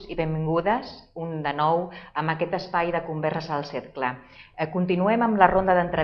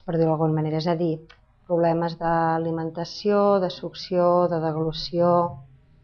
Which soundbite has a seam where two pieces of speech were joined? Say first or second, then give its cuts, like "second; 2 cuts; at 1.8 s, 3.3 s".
second; 1 cut; at 1.3 s